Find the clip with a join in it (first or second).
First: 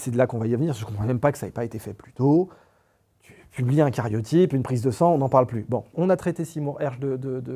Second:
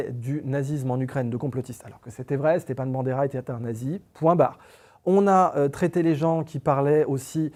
first